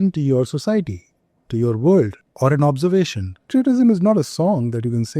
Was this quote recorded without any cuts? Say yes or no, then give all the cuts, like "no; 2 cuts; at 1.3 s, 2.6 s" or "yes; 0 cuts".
no; 2 cuts; at 2.2 s, 3.5 s